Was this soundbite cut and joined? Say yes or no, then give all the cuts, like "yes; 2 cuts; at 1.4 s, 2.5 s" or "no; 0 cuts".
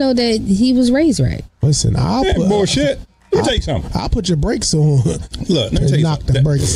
no; 0 cuts